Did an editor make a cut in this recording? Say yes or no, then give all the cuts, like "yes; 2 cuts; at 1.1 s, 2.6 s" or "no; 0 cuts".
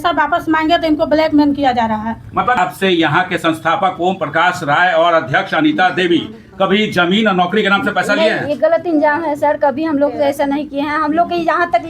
yes; 1 cut; at 2.6 s